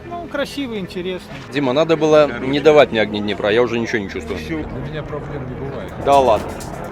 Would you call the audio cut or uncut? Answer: cut